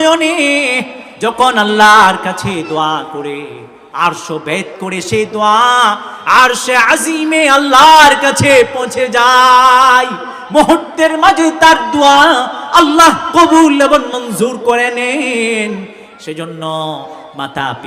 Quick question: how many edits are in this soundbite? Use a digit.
0